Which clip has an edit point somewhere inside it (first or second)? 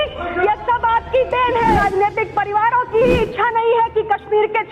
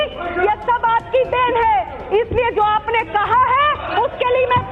first